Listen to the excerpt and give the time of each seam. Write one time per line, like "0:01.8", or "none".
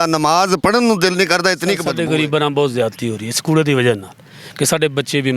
0:01.9